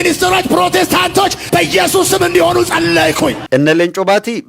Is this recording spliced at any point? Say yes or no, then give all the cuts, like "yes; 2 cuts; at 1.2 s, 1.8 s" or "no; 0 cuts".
yes; 1 cut; at 3.4 s